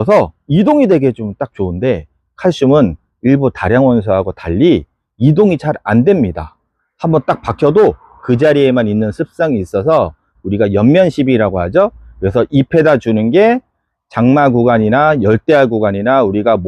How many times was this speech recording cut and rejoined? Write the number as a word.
zero